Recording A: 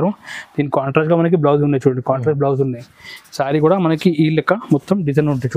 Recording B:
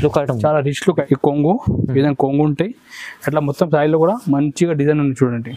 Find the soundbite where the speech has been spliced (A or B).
B